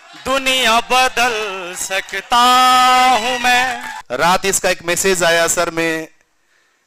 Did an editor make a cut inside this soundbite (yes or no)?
yes